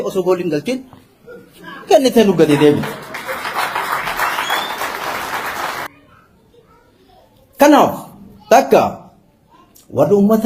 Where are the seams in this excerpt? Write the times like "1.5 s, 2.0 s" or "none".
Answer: 5.9 s